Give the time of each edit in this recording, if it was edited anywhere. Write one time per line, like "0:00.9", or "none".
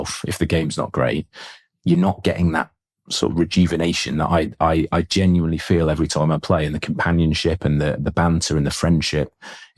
none